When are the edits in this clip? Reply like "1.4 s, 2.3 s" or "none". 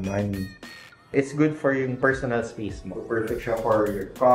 1.1 s, 2.8 s